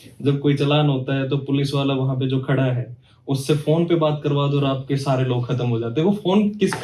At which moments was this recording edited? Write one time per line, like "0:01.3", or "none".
none